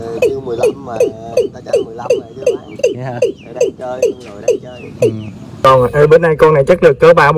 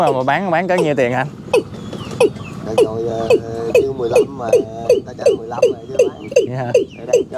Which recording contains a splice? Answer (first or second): first